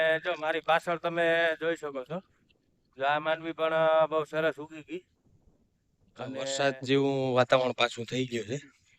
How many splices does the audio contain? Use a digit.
1